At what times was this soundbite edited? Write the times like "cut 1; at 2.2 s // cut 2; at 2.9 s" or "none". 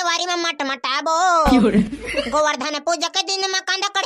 none